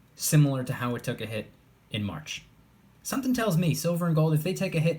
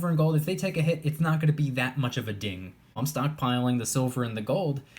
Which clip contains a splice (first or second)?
second